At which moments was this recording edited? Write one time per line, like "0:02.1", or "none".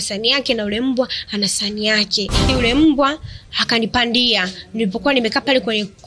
0:02.5